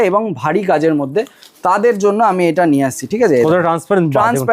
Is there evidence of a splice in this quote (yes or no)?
no